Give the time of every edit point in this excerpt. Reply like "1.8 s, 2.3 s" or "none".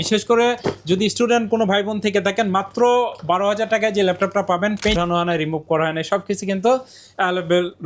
4.9 s